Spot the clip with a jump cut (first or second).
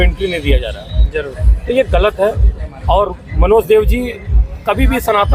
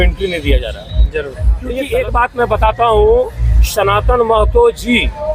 second